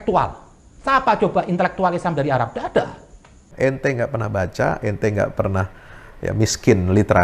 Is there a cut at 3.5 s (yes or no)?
yes